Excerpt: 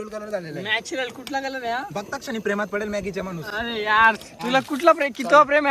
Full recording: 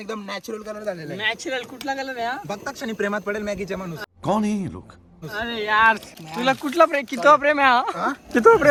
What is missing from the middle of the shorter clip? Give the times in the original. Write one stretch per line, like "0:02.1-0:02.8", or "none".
0:04.0-0:05.3
0:06.1-0:06.2

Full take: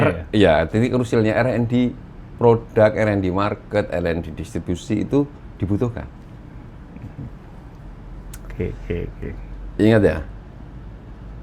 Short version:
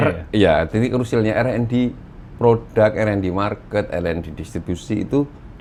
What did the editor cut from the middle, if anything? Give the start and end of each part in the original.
none

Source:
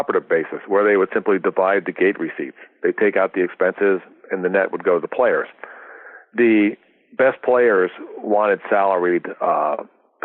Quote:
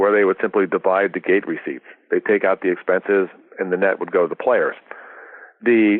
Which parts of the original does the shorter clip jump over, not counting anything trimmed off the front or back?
none

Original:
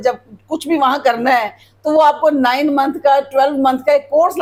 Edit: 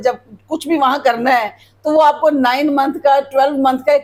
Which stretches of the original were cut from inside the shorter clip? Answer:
none

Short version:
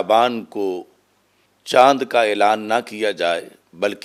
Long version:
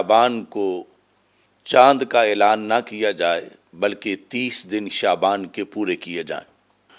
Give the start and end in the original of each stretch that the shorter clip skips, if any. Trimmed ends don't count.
none

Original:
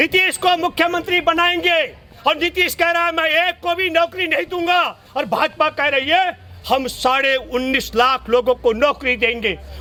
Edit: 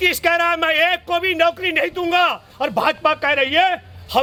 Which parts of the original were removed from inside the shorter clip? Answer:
none

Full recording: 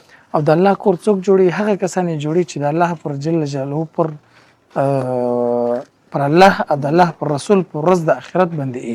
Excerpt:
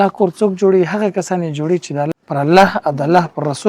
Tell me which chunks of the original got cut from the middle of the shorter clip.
0:02.7-0:05.9

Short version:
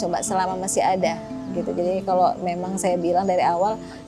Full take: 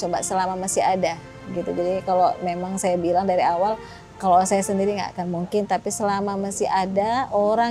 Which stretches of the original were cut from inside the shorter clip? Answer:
none

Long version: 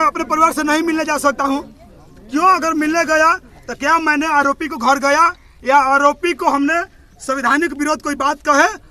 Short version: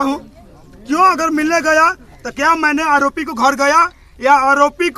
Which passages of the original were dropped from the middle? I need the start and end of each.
none

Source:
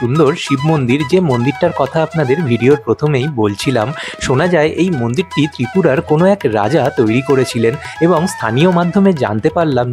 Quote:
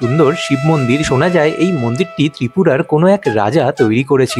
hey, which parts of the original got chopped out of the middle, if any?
0:01.0-0:04.2

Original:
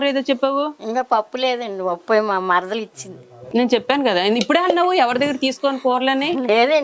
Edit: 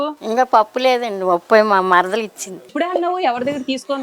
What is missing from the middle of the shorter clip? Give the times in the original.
0:03.3-0:04.4

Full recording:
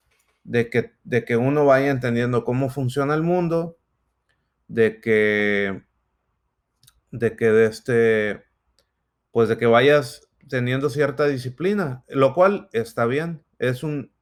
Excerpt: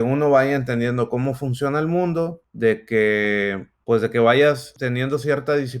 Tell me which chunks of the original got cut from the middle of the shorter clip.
0:03.8-0:04.6
0:05.8-0:09.1
0:10.2-0:10.4

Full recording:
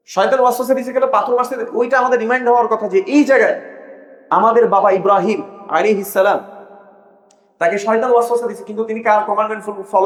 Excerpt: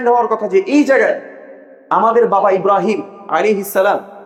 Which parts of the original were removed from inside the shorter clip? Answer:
none

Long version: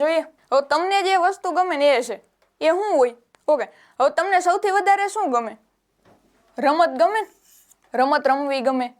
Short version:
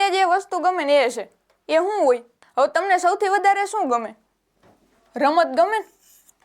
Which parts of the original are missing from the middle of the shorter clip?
0:03.3-0:03.8

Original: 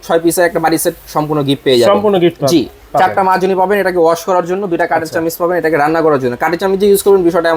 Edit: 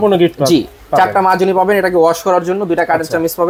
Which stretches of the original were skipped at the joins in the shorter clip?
none

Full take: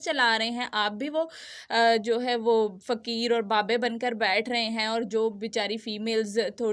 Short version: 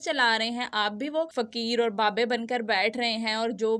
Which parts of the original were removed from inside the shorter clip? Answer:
0:01.4-0:02.9

